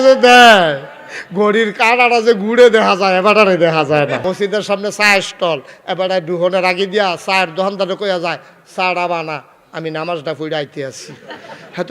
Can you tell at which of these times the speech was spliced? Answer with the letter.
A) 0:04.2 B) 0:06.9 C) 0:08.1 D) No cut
A